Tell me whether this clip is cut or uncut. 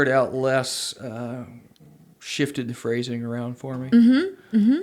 uncut